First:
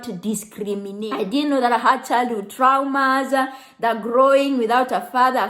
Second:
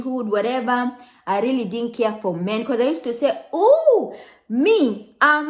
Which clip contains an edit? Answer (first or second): first